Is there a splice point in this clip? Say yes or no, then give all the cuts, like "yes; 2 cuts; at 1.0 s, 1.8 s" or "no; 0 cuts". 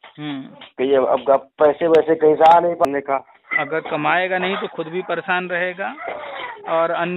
yes; 1 cut; at 2.8 s